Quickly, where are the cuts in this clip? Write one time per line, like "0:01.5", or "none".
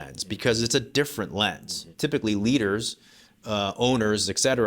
0:01.9